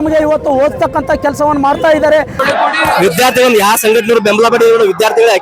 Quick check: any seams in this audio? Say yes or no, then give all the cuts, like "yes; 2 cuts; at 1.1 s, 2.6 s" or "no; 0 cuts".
yes; 1 cut; at 2.4 s